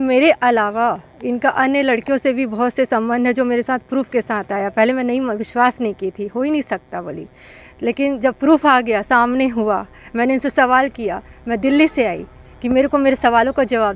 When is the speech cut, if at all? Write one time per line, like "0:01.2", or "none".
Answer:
none